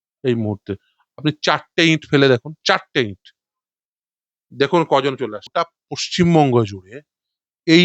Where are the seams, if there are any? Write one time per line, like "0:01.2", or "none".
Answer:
0:05.5